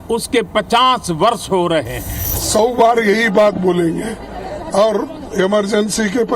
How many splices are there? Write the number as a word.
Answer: one